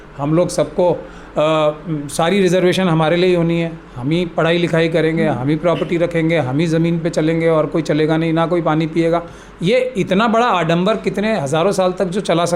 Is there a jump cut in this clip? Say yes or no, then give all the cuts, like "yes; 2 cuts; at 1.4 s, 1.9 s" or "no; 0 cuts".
no; 0 cuts